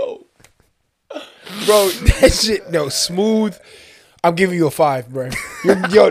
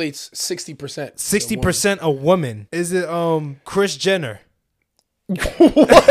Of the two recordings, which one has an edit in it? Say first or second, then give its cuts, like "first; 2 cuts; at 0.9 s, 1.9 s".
second; 2 cuts; at 2.6 s, 3.6 s